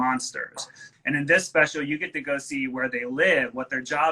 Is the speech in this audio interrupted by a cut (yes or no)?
yes